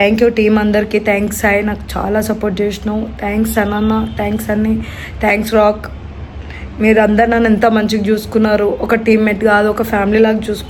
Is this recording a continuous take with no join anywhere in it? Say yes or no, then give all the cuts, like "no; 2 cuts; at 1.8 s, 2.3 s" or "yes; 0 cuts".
yes; 0 cuts